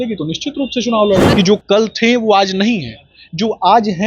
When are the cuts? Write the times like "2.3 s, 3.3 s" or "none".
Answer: 1.3 s